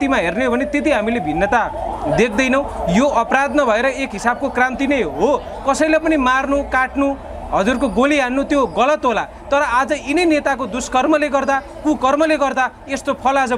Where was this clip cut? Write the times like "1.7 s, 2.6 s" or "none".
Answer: none